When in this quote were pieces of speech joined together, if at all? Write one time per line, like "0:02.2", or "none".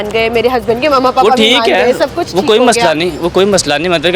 none